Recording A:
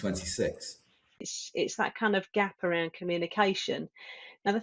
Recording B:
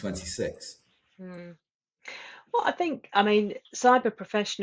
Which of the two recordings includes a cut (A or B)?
A